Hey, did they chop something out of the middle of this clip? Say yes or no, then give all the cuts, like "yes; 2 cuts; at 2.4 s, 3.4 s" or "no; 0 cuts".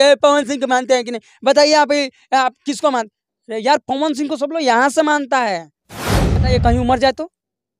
yes; 1 cut; at 6.4 s